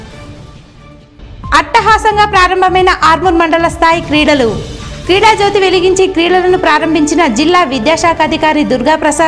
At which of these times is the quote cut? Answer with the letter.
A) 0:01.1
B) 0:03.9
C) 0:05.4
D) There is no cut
A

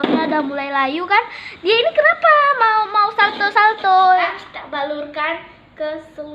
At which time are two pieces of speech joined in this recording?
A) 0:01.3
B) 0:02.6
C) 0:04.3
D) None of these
C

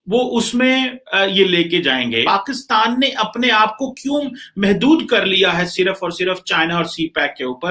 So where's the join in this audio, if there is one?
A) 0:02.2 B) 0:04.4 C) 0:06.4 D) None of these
A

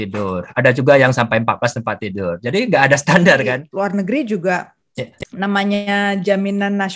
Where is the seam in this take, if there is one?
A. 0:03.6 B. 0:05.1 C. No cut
A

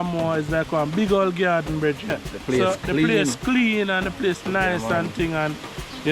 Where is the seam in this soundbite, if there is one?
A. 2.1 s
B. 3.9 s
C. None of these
A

